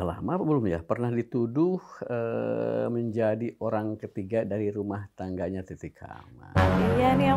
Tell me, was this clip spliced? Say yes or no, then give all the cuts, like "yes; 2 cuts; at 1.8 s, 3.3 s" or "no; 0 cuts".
no; 0 cuts